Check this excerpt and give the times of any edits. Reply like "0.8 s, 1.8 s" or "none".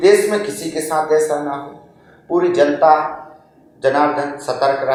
none